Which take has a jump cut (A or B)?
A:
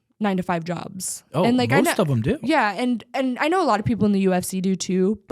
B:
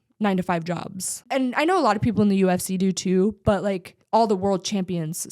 B